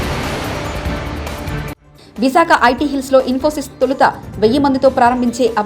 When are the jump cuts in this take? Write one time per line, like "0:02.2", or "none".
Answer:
0:01.8